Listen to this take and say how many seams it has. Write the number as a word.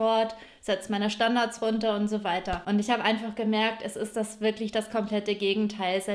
one